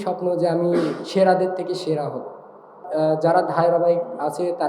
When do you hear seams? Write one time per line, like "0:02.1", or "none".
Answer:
0:02.8